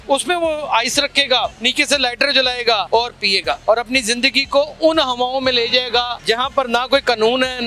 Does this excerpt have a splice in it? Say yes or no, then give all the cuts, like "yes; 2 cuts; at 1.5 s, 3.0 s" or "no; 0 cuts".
yes; 3 cuts; at 1.6 s, 3.1 s, 6.1 s